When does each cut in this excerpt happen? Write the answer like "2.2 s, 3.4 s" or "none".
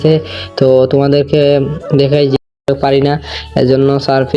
2.5 s